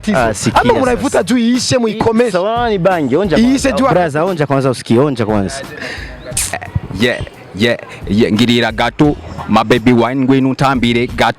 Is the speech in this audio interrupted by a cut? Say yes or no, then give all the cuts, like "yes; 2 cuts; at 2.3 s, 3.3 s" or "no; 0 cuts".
yes; 1 cut; at 6.7 s